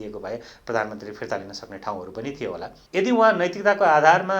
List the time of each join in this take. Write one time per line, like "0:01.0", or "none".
0:02.7